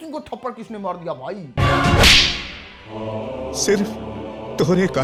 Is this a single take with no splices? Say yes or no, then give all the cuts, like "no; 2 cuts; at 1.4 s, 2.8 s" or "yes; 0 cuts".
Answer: yes; 0 cuts